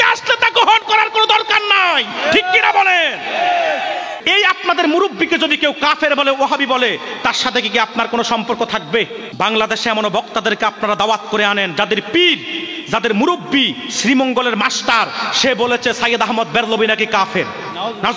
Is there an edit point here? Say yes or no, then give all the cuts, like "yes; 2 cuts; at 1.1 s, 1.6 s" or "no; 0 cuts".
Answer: yes; 2 cuts; at 4.2 s, 9.3 s